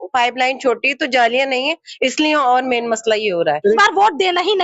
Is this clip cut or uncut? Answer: cut